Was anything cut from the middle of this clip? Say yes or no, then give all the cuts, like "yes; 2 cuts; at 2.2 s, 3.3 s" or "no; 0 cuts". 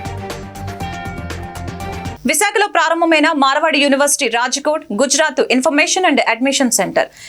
yes; 1 cut; at 2.1 s